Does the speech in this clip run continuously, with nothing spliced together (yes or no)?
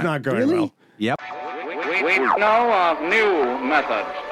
no